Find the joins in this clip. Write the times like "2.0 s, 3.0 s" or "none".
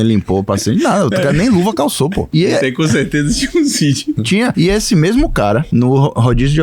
2.3 s, 4.3 s, 5.7 s